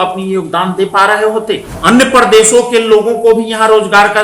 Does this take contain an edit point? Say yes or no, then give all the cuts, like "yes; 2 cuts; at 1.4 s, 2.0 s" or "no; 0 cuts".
yes; 1 cut; at 1.7 s